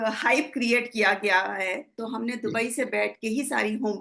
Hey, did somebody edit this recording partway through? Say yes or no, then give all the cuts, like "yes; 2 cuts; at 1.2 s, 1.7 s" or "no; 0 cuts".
yes; 1 cut; at 2.0 s